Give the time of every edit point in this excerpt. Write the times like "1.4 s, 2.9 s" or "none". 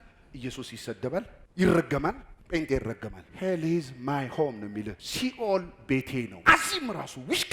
3.2 s, 5.0 s, 6.3 s